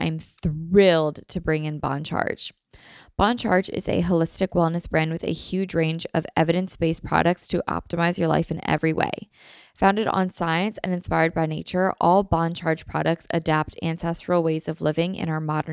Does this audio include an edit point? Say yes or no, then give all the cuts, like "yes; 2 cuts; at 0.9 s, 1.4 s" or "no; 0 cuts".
no; 0 cuts